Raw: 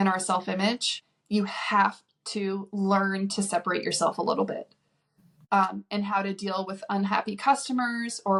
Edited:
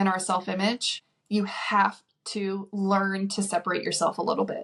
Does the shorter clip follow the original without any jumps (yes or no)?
yes